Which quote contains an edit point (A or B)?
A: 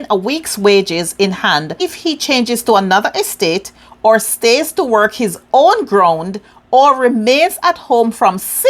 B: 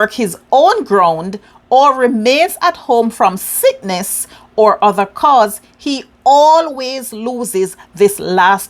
A